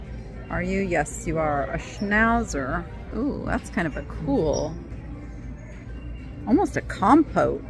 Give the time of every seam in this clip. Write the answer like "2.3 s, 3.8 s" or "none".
3.1 s